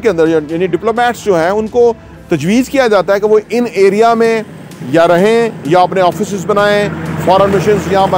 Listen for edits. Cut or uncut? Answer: uncut